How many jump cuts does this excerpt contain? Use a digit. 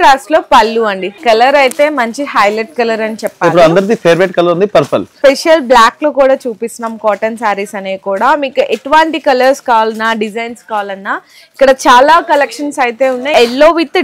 3